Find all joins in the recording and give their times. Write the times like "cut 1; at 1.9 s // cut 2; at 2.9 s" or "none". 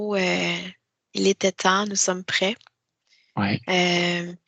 none